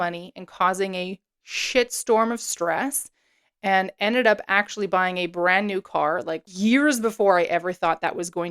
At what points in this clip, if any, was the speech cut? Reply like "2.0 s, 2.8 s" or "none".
6.5 s